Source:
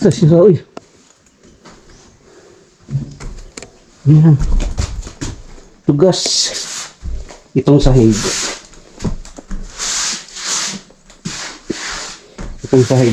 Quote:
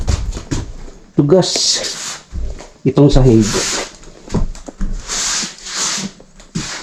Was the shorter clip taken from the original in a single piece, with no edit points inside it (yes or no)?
yes